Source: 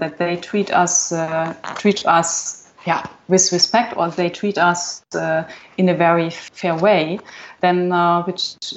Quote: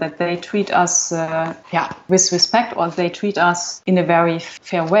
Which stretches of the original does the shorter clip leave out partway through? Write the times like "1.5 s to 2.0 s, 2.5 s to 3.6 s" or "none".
1.8 s to 3.0 s, 4.9 s to 5.6 s